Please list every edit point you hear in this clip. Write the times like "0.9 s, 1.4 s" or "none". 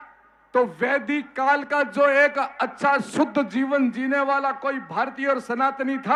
none